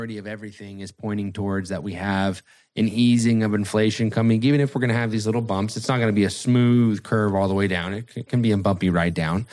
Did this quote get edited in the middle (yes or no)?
no